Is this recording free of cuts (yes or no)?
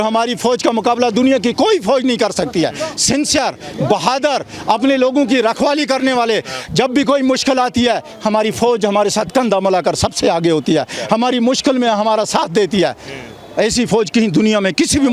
yes